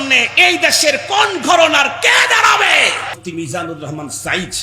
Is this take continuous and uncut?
no; 1 cut; at 3.1 s

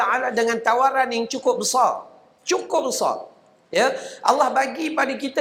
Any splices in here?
no; 0 cuts

